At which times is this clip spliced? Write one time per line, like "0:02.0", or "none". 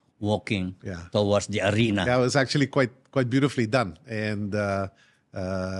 none